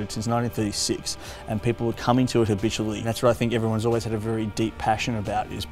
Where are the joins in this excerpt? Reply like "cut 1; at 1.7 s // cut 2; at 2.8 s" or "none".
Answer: cut 1; at 3.1 s